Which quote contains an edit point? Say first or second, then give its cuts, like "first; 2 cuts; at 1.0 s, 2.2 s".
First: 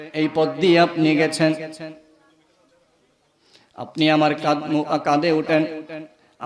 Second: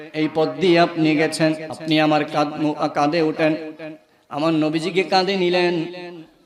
second; 1 cut; at 1.7 s